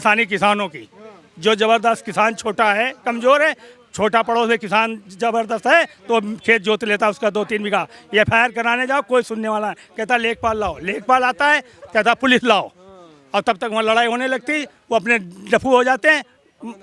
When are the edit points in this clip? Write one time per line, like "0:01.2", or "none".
none